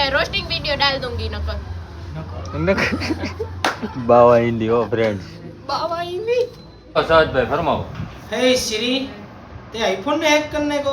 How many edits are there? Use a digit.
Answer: 1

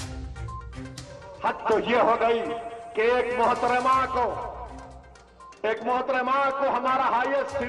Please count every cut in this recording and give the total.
1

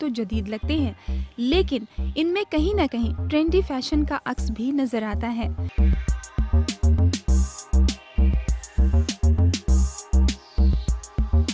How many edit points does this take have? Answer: 1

